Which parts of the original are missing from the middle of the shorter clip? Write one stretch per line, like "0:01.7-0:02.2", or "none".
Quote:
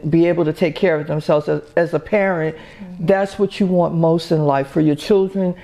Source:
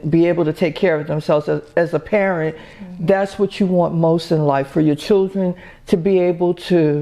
none